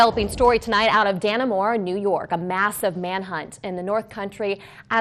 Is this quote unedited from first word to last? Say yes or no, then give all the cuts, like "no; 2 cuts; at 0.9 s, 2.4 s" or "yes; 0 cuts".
yes; 0 cuts